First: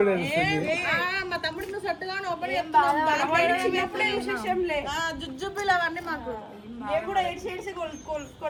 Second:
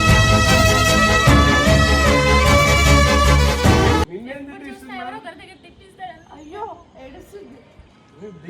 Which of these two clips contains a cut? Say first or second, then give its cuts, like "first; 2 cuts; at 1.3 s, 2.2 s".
second; 1 cut; at 4.1 s